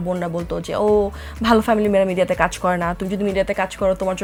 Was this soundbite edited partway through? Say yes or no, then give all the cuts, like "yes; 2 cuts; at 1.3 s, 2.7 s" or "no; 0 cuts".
no; 0 cuts